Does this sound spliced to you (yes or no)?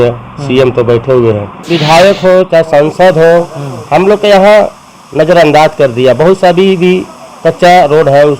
yes